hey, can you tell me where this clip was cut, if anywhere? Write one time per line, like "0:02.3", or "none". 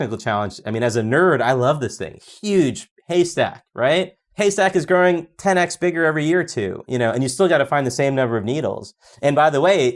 0:04.2